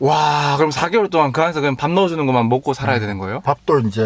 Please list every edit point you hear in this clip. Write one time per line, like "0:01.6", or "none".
none